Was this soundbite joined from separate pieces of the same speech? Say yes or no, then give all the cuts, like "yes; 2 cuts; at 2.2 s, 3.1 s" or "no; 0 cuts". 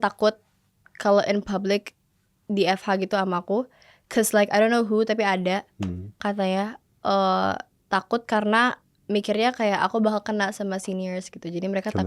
no; 0 cuts